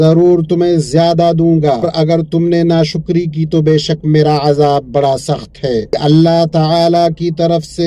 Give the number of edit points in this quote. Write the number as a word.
two